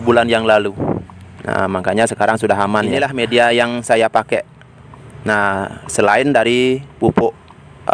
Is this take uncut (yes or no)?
no